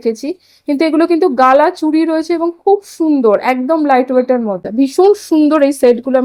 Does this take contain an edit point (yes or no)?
yes